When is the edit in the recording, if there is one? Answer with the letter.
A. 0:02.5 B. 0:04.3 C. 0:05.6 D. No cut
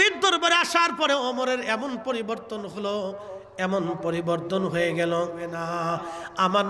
C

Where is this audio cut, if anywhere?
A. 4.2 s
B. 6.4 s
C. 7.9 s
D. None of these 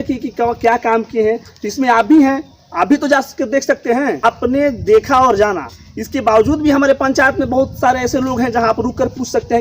A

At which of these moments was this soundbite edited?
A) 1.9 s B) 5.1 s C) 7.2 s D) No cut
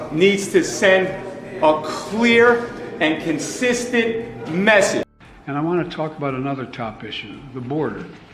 B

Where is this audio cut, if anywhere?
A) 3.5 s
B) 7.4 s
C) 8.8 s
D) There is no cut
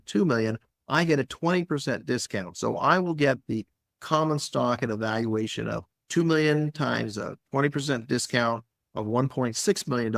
D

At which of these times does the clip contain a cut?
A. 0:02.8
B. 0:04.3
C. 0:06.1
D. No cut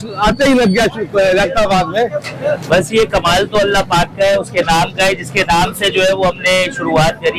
D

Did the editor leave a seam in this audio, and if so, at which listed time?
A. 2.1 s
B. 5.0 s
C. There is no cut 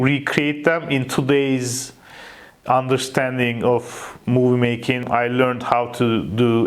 B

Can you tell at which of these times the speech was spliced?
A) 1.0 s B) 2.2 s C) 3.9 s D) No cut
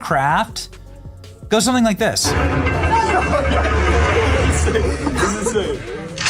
D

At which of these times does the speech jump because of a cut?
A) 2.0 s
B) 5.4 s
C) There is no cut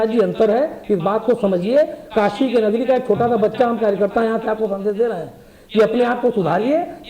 C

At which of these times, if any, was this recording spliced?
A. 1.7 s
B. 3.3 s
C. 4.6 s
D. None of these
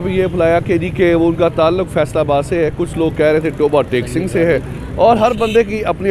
D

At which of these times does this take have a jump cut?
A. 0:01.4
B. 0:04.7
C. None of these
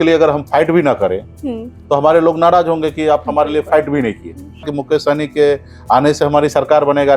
B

